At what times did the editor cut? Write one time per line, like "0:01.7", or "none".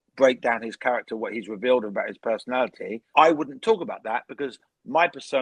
0:03.0